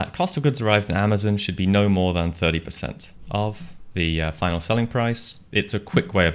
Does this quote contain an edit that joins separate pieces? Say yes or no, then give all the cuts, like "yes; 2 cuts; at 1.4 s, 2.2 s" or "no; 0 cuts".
yes; 3 cuts; at 3.1 s, 3.7 s, 5.3 s